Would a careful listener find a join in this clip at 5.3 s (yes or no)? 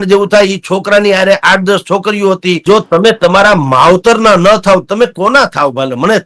no